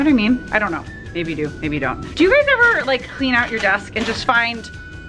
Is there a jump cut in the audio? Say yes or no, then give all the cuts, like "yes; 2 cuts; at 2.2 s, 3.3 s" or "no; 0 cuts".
yes; 1 cut; at 2.0 s